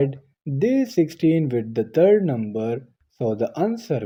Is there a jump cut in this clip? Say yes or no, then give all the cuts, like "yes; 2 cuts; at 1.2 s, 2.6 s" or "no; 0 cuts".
no; 0 cuts